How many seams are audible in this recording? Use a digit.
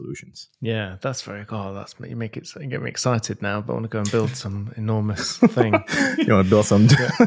0